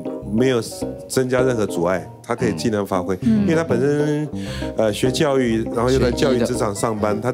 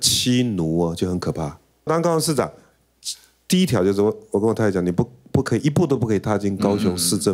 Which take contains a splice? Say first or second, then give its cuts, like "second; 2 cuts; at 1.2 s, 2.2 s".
second; 1 cut; at 1.9 s